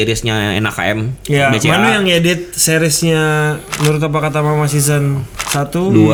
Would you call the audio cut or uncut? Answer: uncut